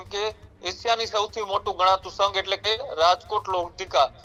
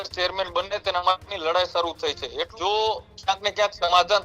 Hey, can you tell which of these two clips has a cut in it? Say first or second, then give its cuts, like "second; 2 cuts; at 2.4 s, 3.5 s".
second; 1 cut; at 2.5 s